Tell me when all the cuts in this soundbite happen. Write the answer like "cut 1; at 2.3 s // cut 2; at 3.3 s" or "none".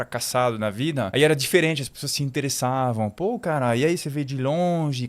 none